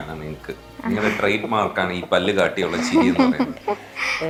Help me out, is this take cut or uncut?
uncut